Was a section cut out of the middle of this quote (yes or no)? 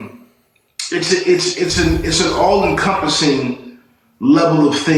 no